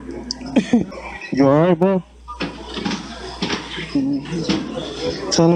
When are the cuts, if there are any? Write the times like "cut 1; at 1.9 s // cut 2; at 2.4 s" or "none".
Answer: cut 1; at 1.1 s